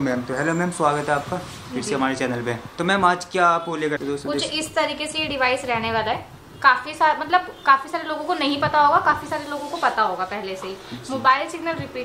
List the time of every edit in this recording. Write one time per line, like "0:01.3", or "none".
0:04.0